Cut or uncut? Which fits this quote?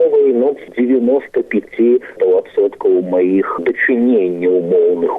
cut